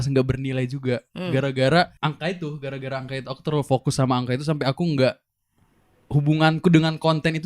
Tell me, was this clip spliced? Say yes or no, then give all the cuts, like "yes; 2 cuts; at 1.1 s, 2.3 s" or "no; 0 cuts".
yes; 1 cut; at 1.9 s